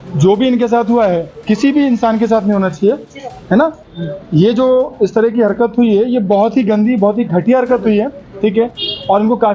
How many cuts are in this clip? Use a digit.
0